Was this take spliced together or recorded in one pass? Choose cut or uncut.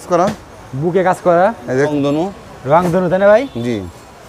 cut